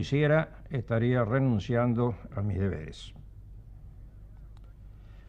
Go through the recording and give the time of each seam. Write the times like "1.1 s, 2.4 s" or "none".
none